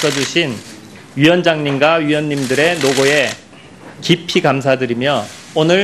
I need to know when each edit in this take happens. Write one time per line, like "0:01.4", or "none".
0:01.5